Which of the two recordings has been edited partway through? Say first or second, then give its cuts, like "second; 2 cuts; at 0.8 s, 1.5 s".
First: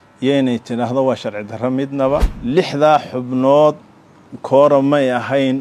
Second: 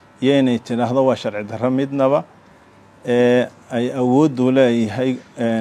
first; 1 cut; at 2.3 s